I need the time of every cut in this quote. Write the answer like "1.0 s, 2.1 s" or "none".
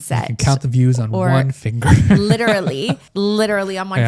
3.0 s